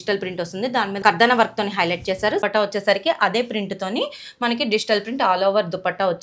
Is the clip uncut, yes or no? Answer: no